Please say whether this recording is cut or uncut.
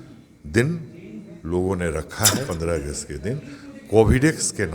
cut